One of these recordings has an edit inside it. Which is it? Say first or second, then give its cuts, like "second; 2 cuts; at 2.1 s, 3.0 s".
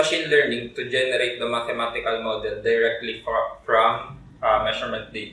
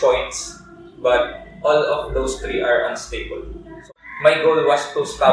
second; 1 cut; at 3.8 s